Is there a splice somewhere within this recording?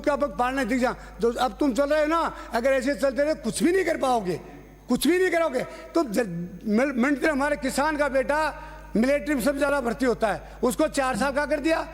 yes; 1 cut; at 7.3 s

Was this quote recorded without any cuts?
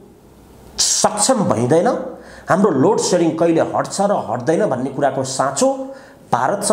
yes; 0 cuts

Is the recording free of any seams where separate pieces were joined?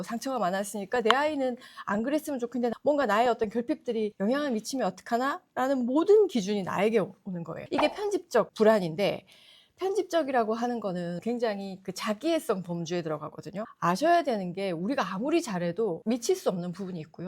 no; 1 cut; at 2.7 s

